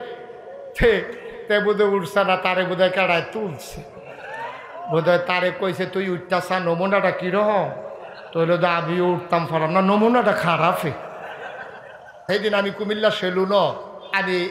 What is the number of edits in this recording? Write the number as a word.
one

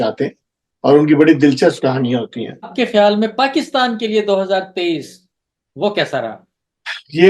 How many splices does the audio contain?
one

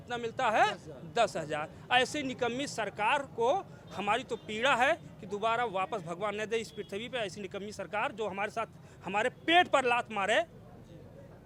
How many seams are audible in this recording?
zero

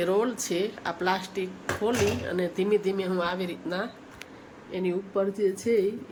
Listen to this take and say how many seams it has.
zero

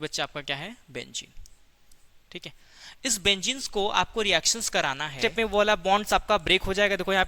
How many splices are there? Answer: one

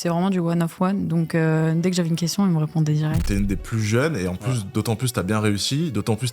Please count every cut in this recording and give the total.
one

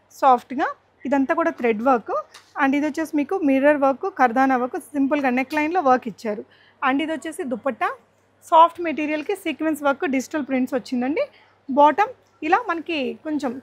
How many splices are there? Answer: zero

